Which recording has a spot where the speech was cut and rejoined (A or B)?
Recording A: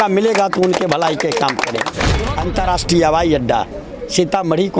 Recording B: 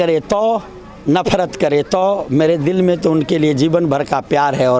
A